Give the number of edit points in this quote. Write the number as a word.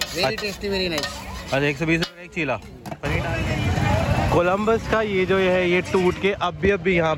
one